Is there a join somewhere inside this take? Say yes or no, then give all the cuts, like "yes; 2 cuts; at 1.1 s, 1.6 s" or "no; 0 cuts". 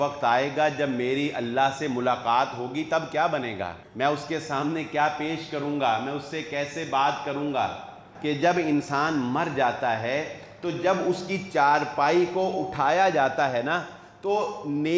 yes; 2 cuts; at 3.8 s, 8.1 s